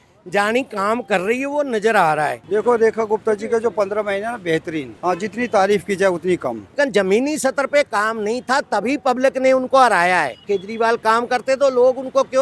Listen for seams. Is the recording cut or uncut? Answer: cut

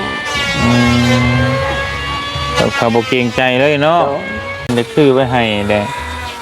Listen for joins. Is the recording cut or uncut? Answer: cut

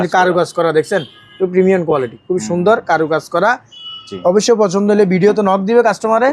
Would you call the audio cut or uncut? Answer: uncut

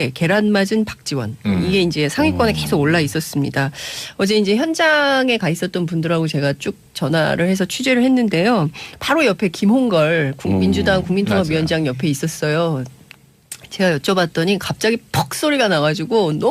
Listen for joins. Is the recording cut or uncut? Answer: uncut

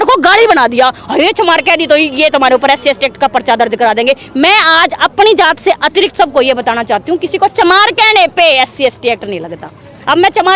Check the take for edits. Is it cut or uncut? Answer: uncut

